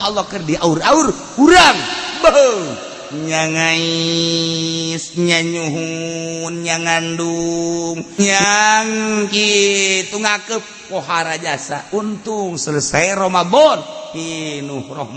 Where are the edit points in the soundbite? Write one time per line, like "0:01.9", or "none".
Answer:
0:08.2